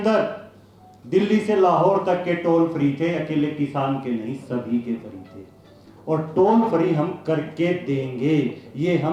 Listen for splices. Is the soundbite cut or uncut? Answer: uncut